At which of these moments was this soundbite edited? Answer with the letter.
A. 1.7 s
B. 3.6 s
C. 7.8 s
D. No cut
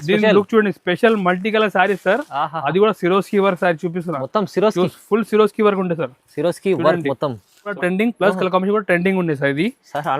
C